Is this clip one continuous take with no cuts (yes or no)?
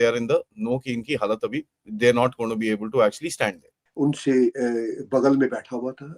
no